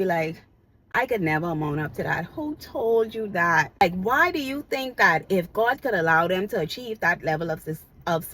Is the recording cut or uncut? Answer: cut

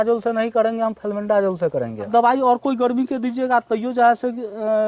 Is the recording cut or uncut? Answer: cut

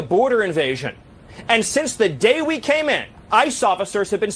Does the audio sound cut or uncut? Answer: cut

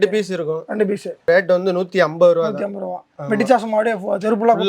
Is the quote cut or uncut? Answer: cut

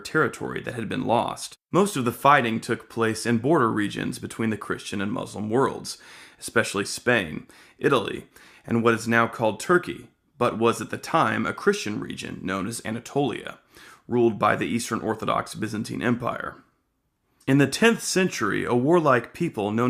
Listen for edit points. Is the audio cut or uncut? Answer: uncut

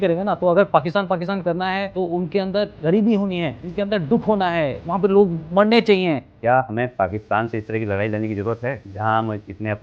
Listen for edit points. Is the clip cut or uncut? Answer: cut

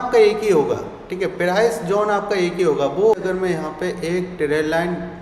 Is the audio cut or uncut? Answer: cut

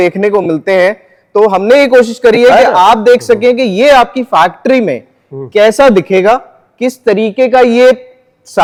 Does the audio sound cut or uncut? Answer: uncut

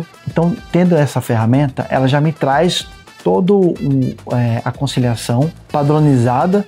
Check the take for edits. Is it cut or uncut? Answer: uncut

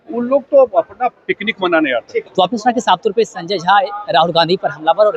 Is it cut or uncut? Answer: uncut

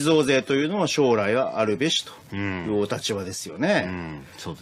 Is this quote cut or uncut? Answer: cut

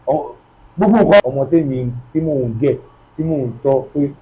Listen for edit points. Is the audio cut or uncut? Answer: cut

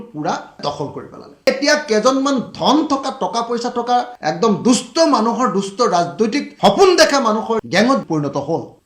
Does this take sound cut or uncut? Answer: cut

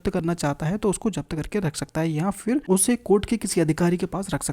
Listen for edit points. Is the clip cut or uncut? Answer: cut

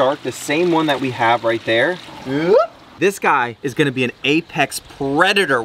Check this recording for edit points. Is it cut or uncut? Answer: cut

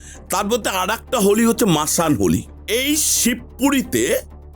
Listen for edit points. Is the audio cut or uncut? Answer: cut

